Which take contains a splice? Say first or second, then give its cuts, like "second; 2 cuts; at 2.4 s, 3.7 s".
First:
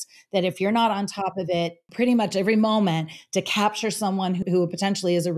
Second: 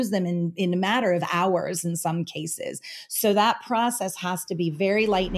first; 2 cuts; at 1.8 s, 4.4 s